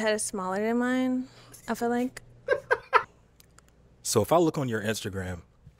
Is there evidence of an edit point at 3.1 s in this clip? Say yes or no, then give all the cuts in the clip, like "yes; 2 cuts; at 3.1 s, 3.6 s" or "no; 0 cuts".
yes; 1 cut; at 3.1 s